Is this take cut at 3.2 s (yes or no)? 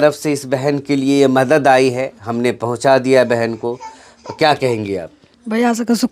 no